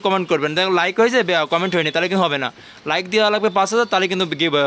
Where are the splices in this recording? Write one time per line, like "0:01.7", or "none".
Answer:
none